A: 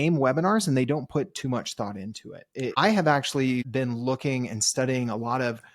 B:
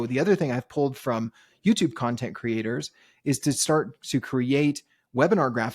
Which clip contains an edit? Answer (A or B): A